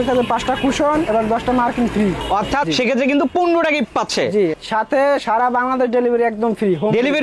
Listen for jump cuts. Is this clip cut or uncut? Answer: uncut